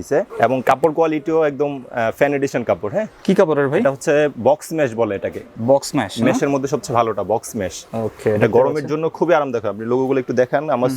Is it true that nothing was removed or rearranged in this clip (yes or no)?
yes